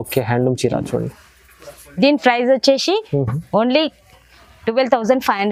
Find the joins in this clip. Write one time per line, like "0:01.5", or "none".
none